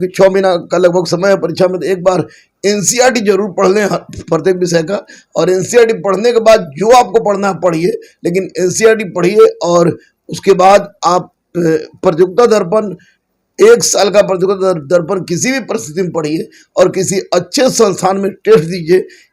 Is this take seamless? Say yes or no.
yes